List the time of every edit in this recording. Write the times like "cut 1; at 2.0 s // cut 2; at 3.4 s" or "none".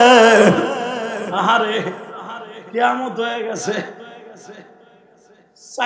cut 1; at 1.3 s